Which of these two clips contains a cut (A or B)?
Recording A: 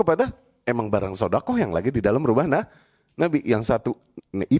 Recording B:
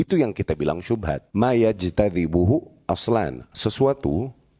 B